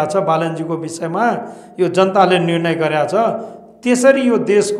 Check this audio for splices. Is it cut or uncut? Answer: uncut